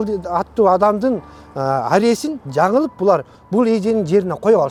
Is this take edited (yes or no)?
no